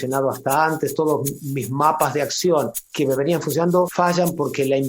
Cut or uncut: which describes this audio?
cut